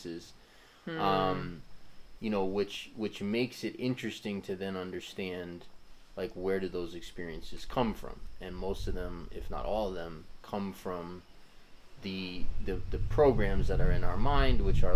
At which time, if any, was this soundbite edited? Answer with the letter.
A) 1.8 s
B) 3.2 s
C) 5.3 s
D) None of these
D